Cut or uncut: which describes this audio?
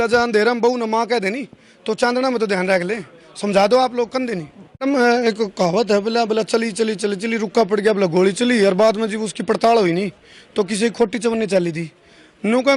cut